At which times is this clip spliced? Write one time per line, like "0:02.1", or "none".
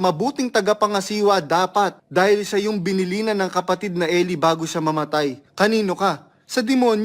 0:02.0
0:05.4